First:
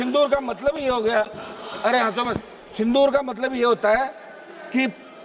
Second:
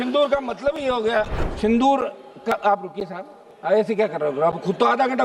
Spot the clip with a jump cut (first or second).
second